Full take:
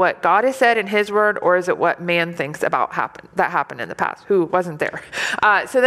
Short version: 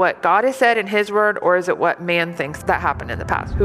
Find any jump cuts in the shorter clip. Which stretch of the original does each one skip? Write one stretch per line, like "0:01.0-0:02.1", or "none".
0:02.5-0:03.2